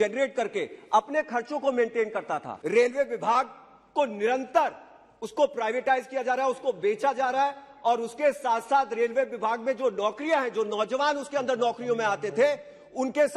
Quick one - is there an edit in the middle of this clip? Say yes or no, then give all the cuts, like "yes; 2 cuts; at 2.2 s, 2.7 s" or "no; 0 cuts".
yes; 1 cut; at 2.5 s